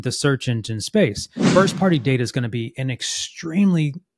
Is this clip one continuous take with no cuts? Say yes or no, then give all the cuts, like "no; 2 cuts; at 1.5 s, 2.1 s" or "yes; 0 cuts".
no; 1 cut; at 1.4 s